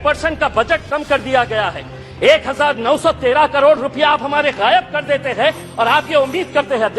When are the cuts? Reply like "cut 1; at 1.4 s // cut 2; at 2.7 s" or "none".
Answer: none